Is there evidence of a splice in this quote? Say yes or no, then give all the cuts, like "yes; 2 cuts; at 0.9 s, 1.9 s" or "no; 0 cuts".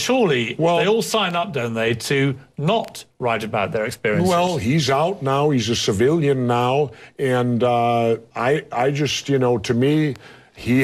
no; 0 cuts